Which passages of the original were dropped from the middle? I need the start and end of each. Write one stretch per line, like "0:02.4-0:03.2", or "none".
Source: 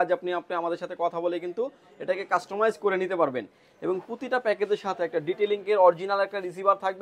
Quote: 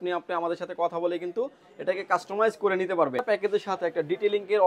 0:03.4-0:04.4